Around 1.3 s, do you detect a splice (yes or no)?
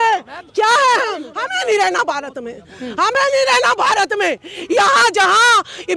yes